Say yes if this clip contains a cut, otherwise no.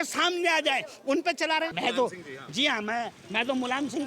yes